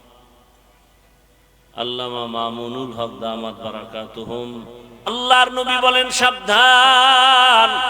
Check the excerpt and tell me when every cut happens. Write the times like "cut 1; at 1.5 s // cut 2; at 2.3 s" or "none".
cut 1; at 5.1 s